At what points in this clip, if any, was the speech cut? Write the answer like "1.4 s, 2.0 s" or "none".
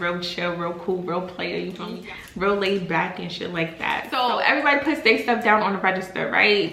none